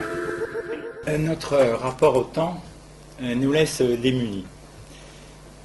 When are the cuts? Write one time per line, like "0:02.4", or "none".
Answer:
none